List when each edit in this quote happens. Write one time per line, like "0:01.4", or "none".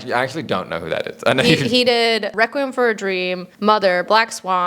0:02.3
0:03.5